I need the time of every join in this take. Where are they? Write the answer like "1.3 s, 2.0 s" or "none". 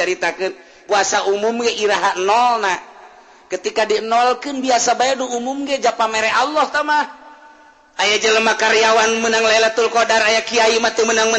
none

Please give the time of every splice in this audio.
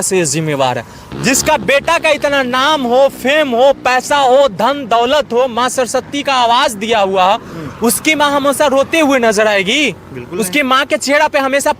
1.0 s

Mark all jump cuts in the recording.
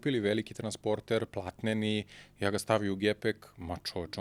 none

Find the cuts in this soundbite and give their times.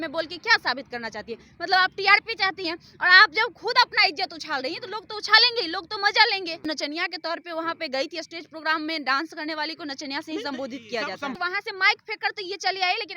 6.6 s, 11.4 s

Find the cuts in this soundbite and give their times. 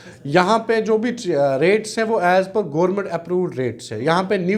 none

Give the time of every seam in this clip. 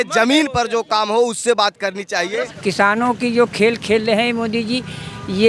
2.5 s

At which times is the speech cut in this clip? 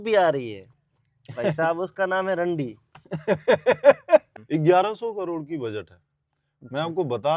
4.4 s

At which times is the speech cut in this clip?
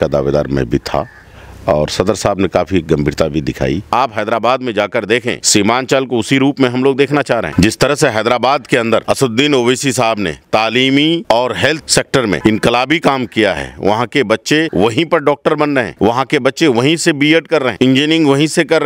3.9 s

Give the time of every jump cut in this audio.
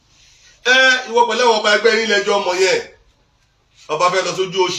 none

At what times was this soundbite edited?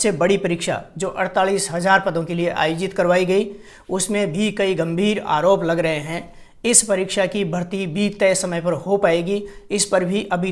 none

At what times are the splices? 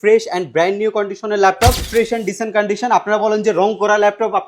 1.9 s

